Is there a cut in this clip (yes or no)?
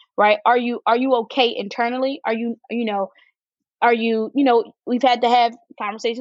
no